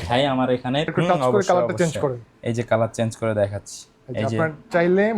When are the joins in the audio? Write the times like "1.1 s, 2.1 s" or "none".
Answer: 0.9 s